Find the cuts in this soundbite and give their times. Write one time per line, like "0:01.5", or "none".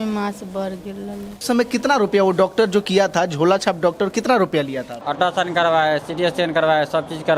0:01.4
0:05.0

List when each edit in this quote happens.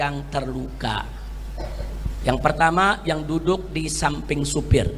none

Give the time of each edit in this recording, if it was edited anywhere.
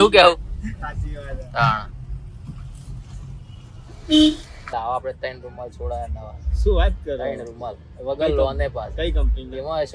0:04.7

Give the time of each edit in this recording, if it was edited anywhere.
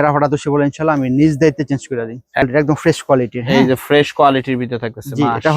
0:02.4

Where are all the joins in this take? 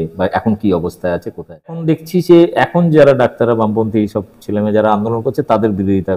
0:01.8

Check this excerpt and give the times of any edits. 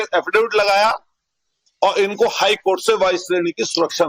0:02.6

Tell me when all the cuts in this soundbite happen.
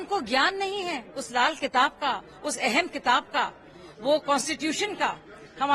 none

